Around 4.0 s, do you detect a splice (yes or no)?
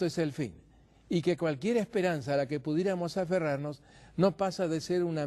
yes